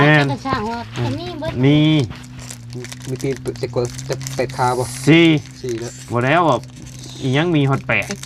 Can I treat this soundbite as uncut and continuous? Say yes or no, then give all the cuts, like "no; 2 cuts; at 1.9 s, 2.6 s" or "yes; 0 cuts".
yes; 0 cuts